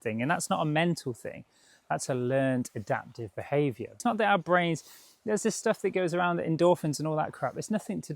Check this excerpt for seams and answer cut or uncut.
cut